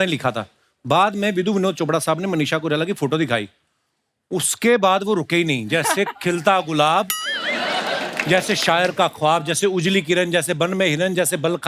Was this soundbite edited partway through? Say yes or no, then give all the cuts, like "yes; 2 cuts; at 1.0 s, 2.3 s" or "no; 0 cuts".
no; 0 cuts